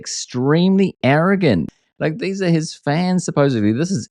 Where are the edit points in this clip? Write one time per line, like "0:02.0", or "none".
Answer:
0:01.7